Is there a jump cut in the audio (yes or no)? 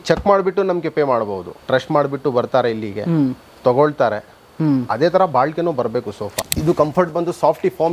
yes